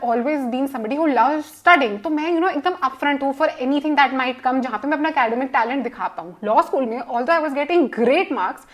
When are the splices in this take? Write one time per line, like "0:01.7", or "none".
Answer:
none